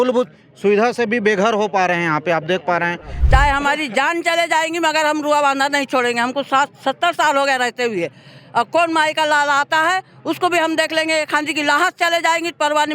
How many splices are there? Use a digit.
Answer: 1